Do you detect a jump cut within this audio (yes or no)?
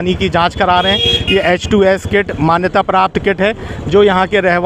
no